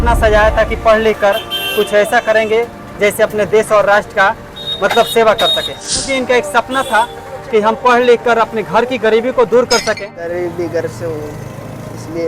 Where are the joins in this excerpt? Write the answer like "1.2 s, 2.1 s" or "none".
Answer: 6.1 s, 9.8 s